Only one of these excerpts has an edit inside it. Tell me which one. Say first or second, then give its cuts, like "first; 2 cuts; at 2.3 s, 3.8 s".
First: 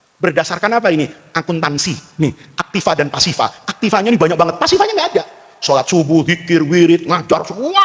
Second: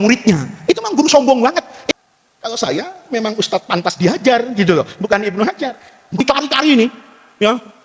second; 2 cuts; at 1.9 s, 6.2 s